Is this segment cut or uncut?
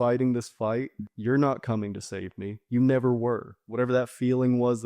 cut